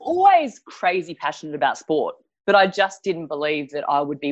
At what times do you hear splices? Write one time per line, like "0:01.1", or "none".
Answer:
none